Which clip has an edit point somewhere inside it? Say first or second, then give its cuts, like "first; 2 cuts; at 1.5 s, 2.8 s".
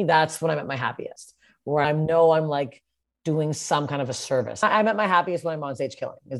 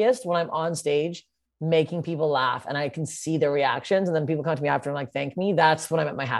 first; 2 cuts; at 1.8 s, 4.6 s